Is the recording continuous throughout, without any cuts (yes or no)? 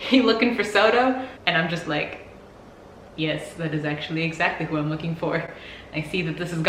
yes